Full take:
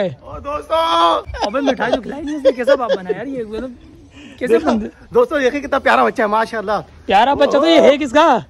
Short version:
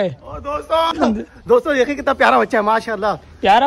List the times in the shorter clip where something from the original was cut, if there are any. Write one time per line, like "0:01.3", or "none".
0:00.9